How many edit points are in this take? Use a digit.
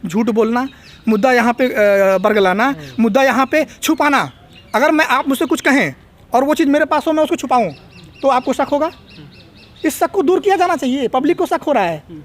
0